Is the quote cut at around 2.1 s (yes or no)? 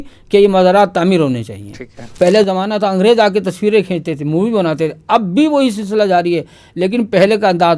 yes